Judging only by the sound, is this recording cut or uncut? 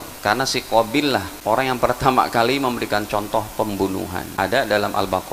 cut